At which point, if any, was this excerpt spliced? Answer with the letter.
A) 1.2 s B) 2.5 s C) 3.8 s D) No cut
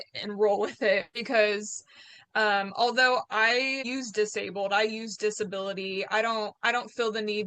C